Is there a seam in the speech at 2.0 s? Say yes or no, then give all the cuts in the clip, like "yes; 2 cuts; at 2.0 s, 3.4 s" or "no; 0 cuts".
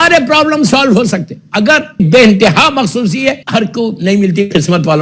yes; 2 cuts; at 2.0 s, 3.4 s